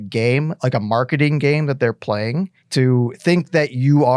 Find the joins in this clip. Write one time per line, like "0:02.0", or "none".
0:02.6